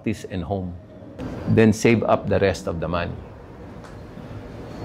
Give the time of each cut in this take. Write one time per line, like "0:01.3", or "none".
0:01.1